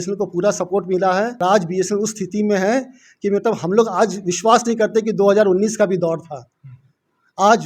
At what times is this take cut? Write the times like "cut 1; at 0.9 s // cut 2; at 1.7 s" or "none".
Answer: cut 1; at 1.4 s